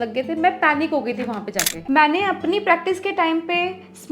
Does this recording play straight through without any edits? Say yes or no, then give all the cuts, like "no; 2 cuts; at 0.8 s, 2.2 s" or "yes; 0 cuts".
no; 1 cut; at 1.8 s